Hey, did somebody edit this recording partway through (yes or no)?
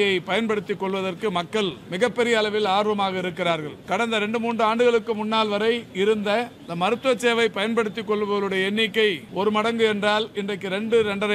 yes